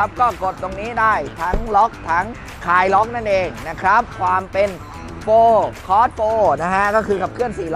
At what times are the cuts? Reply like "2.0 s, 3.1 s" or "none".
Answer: 4.1 s